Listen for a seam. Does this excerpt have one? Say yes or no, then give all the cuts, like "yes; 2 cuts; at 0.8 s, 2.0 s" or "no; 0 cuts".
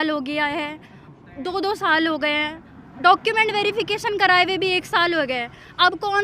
no; 0 cuts